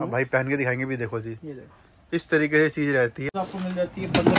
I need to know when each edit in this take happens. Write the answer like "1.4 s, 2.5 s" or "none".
3.3 s